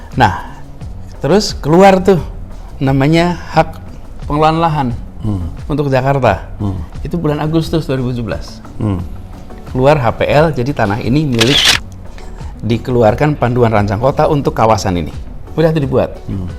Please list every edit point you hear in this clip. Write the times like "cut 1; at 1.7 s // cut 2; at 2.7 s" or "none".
cut 1; at 11.8 s